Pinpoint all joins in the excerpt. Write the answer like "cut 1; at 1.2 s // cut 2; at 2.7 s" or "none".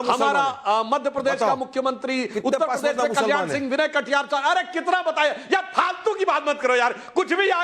cut 1; at 3.6 s